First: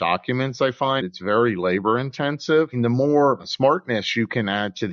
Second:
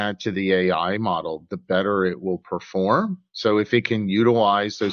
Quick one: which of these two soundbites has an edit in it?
first; 3 cuts; at 1.0 s, 2.7 s, 3.5 s

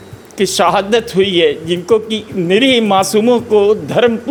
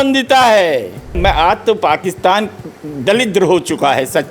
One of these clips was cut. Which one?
second; 1 cut; at 1.2 s

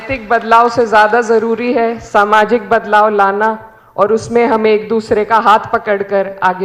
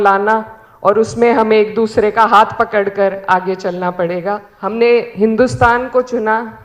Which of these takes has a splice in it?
second; 1 cut; at 4.5 s

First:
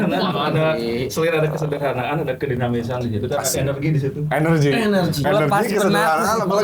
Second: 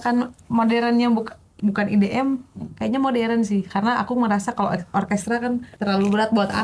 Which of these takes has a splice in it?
second; 2 cuts; at 1.5 s, 5.7 s

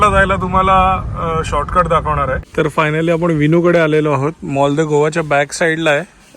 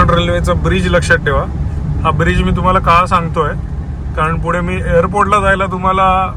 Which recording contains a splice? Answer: first; 1 cut; at 2.4 s

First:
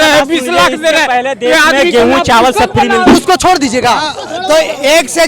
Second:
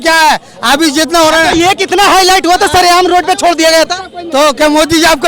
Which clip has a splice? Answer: first; 1 cut; at 3.1 s

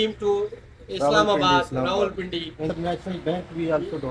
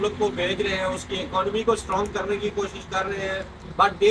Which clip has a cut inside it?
first; 1 cut; at 2.7 s

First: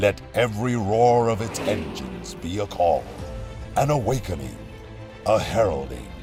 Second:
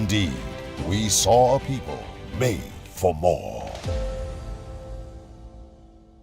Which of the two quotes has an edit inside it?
second; 1 cut; at 1.4 s

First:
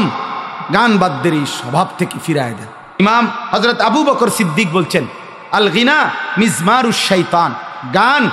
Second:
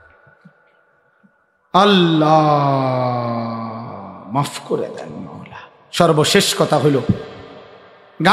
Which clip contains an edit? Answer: first; 1 cut; at 3.0 s

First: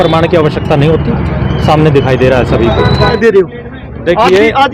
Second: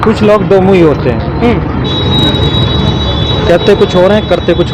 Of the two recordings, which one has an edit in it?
first; 1 cut; at 3.1 s

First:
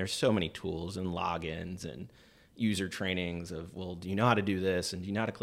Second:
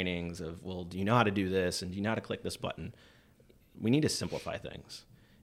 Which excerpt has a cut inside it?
second; 1 cut; at 3.7 s

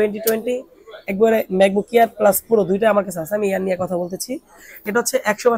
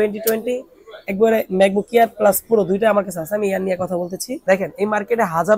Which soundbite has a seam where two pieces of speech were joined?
second; 1 cut; at 4.3 s

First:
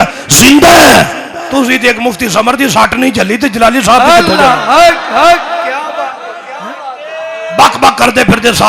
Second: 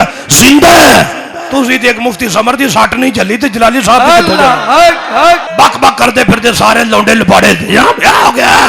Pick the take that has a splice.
second; 1 cut; at 5.5 s

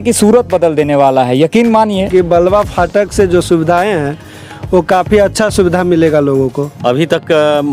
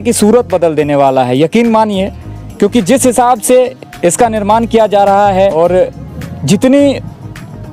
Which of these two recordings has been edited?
first; 2 cuts; at 2.1 s, 6.7 s

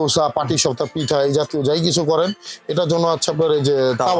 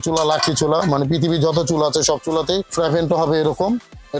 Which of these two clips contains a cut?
second; 1 cut; at 2.7 s

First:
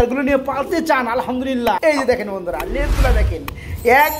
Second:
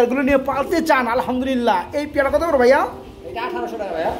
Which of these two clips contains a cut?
first; 1 cut; at 1.6 s

